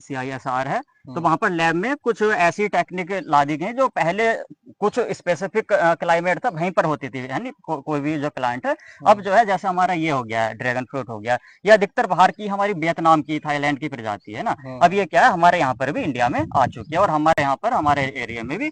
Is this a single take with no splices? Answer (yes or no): yes